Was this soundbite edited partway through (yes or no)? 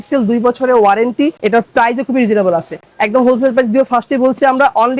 no